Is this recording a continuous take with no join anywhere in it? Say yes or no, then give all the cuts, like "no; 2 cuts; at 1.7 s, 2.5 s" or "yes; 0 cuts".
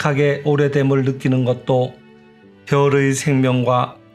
yes; 0 cuts